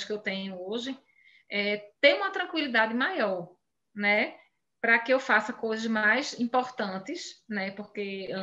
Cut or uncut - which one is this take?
uncut